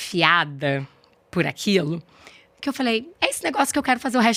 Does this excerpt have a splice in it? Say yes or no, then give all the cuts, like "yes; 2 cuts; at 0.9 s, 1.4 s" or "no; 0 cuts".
no; 0 cuts